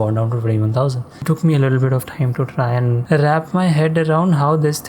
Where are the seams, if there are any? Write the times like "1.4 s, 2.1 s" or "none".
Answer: 1.2 s, 3.0 s